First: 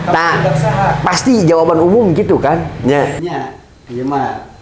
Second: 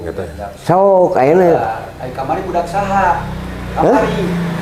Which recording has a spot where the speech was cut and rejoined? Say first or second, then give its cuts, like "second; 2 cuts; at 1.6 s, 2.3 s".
first; 1 cut; at 3.1 s